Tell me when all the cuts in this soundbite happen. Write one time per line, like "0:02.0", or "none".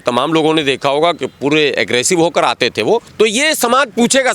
0:03.1